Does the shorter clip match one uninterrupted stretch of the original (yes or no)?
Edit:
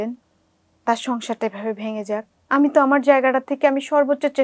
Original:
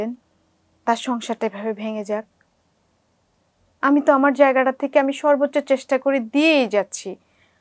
no